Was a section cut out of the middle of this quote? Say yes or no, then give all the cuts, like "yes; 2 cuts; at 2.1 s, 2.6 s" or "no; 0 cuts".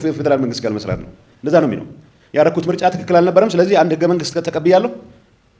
no; 0 cuts